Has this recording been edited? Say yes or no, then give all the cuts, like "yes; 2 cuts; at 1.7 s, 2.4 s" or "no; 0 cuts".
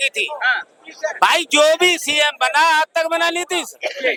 no; 0 cuts